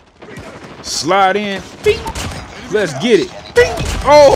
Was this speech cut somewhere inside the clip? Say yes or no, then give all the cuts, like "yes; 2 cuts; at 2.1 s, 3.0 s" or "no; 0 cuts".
yes; 1 cut; at 1.0 s